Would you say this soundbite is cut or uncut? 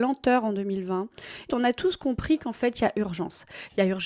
cut